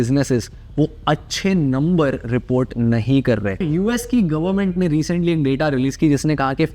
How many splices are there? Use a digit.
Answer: 1